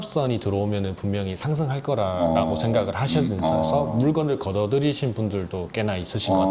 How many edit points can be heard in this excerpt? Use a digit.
0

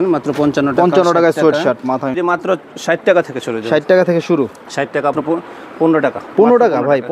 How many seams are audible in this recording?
2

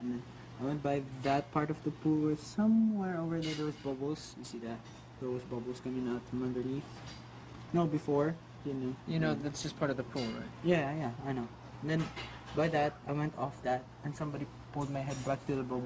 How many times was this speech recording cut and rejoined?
0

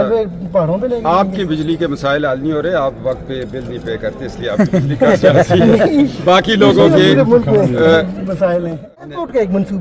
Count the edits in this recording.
1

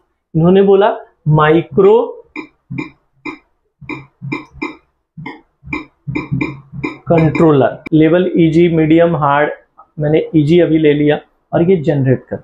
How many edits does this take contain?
1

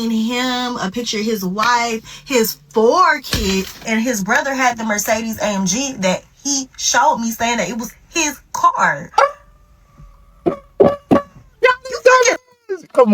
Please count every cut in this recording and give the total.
1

